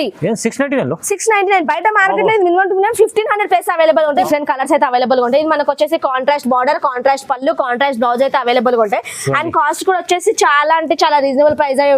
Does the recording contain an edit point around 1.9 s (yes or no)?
no